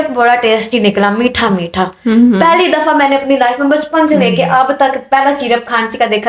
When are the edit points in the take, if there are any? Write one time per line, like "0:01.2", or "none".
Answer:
none